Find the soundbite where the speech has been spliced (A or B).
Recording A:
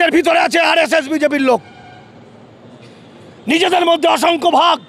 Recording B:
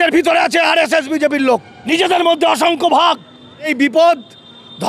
B